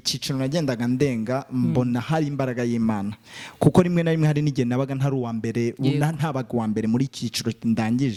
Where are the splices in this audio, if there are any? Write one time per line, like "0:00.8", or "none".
none